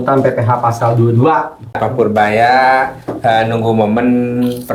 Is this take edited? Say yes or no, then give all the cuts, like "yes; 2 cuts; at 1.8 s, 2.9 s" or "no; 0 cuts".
yes; 1 cut; at 1.7 s